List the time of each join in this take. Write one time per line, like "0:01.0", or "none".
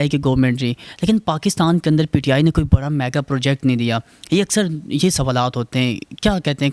none